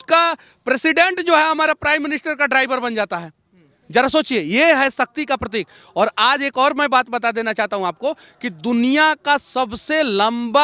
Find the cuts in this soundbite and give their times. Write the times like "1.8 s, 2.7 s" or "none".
none